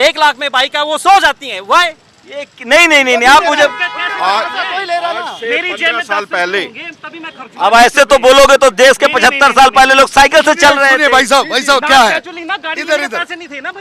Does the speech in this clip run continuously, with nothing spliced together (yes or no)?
yes